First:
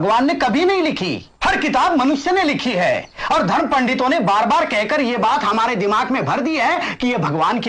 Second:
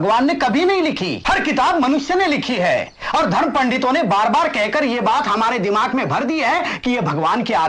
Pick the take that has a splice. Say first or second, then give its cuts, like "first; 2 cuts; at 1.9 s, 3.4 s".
second; 1 cut; at 1.1 s